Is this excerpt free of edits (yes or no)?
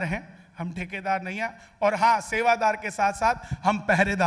yes